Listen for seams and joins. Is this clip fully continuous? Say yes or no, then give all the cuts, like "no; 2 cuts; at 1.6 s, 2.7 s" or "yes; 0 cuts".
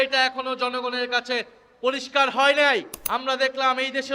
no; 1 cut; at 3.0 s